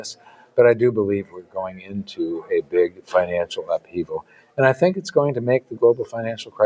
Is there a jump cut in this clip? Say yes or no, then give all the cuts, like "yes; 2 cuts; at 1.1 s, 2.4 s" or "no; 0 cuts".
no; 0 cuts